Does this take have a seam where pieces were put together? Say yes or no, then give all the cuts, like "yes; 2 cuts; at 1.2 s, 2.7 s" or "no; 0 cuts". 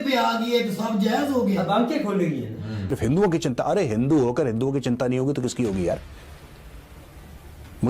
yes; 1 cut; at 2.9 s